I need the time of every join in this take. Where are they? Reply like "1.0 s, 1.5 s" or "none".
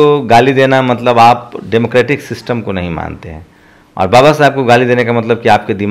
none